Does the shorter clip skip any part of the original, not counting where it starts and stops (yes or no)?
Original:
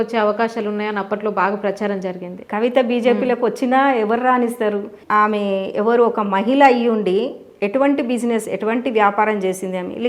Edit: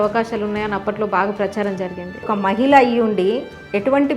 yes